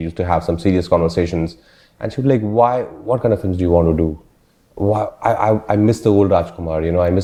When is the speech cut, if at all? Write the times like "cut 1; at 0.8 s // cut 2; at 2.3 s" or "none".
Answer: none